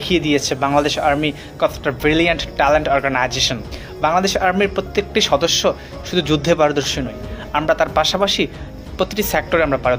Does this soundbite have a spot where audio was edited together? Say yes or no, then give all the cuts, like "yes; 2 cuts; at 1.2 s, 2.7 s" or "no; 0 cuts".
yes; 1 cut; at 3.7 s